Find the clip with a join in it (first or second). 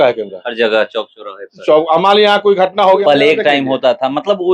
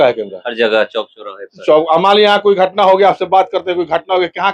first